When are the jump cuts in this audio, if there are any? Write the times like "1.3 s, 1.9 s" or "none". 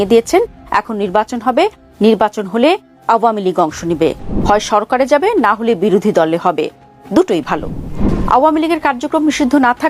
7.9 s